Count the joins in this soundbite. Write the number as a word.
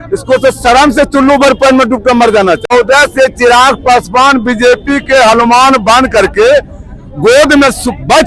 one